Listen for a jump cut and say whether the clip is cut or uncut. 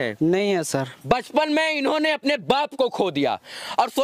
uncut